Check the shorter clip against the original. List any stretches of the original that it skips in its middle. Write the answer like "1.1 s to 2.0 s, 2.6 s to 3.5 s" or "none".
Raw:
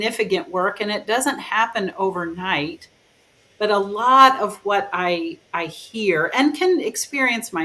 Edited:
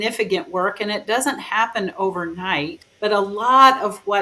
2.8 s to 3.4 s